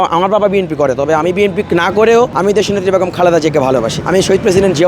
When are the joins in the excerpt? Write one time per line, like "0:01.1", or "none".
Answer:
0:02.3
0:04.0